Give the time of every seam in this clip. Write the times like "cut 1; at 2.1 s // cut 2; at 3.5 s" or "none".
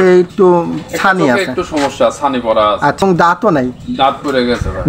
cut 1; at 3.0 s

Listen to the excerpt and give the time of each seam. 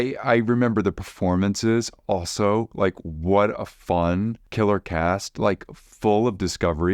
cut 1; at 4.4 s

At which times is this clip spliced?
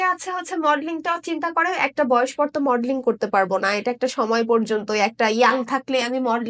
none

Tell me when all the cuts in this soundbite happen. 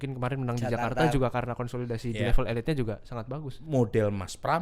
cut 1; at 3.6 s

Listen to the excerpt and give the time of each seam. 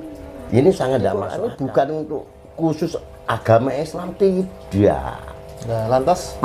cut 1; at 1.3 s

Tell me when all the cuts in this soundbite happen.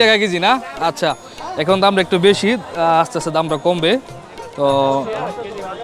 none

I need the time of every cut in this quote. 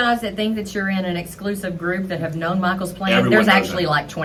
none

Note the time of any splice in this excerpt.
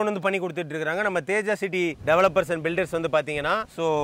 none

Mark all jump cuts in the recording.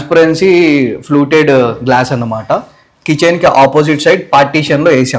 none

